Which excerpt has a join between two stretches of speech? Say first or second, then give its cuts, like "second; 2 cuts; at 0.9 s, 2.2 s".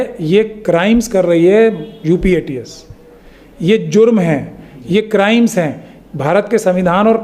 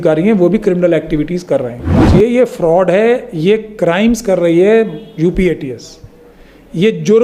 second; 1 cut; at 2.0 s